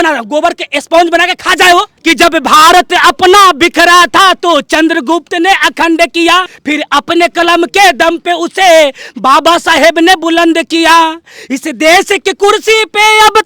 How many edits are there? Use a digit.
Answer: 2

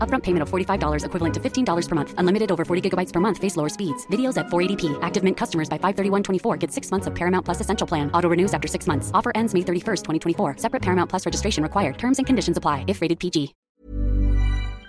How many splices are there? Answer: 1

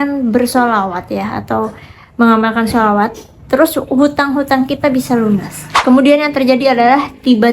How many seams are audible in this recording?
1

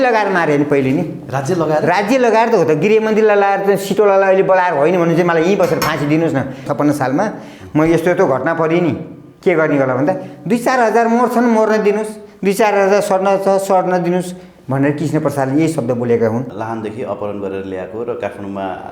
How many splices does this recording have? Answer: 2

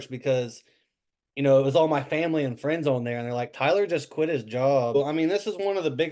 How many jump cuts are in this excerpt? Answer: 1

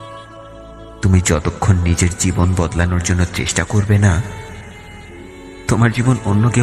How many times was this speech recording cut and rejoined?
1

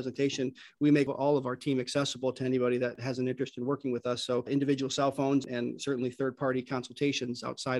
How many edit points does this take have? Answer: 3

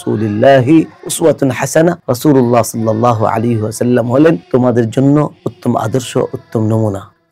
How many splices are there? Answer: 2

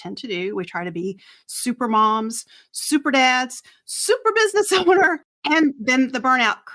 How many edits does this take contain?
1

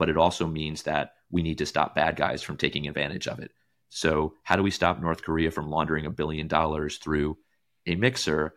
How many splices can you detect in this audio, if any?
0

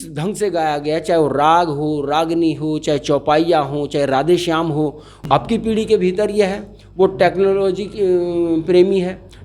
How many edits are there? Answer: 1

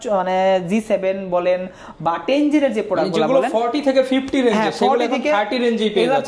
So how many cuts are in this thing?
0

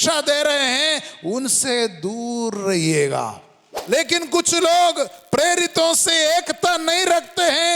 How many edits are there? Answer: 1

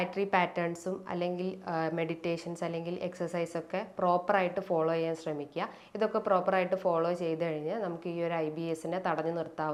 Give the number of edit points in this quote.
0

